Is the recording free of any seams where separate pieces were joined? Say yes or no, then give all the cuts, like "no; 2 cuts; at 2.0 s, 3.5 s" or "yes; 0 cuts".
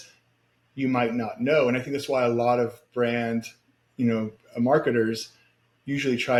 yes; 0 cuts